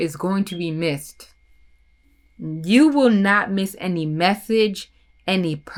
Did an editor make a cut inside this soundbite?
no; 0 cuts

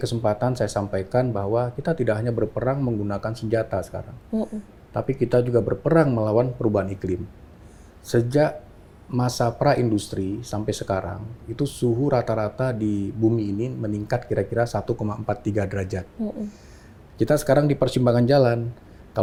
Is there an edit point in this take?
no; 0 cuts

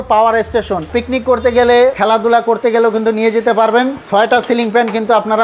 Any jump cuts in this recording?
yes; 3 cuts; at 0.9 s, 2.0 s, 4.0 s

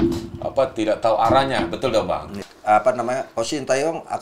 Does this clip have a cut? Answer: yes; 1 cut; at 2.5 s

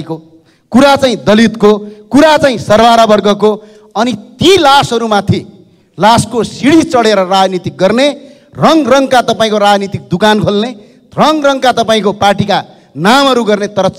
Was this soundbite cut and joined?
no; 0 cuts

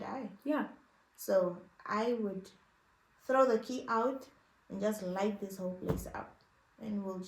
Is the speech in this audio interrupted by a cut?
no; 0 cuts

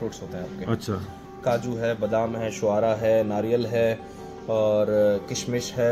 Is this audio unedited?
yes; 0 cuts

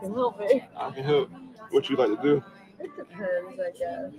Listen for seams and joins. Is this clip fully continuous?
no; 1 cut; at 1.1 s

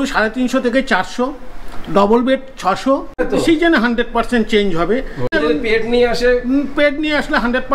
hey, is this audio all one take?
no; 2 cuts; at 3.2 s, 5.4 s

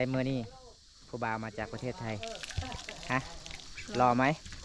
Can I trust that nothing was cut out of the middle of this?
yes; 0 cuts

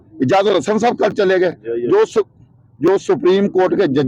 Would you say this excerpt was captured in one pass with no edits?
yes; 0 cuts

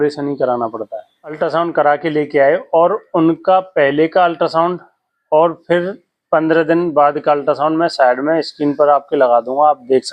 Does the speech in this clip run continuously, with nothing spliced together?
no; 1 cut; at 1.3 s

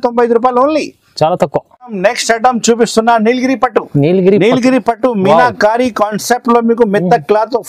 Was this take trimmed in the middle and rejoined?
no; 0 cuts

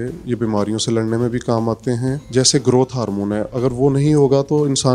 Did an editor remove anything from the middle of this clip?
yes; 1 cut; at 2.2 s

